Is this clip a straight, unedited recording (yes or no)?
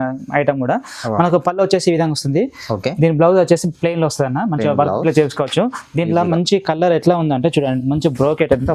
yes